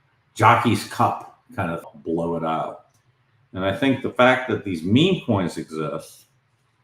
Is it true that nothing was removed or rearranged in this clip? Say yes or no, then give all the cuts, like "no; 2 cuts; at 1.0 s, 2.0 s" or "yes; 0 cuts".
no; 1 cut; at 1.8 s